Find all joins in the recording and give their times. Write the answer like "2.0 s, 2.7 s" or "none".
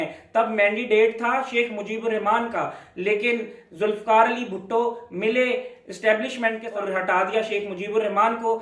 6.6 s